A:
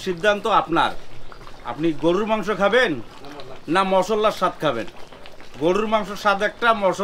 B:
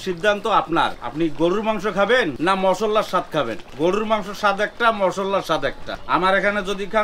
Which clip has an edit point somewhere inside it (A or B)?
B